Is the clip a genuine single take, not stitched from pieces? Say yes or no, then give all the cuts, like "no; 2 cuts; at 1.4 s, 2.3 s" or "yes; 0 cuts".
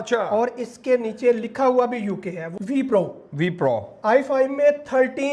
no; 1 cut; at 2.5 s